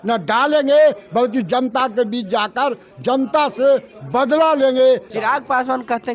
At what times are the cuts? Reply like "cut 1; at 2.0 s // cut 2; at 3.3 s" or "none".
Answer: cut 1; at 5.1 s

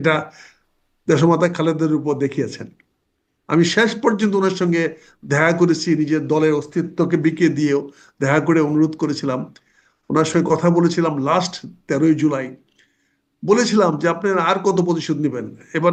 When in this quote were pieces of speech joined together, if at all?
none

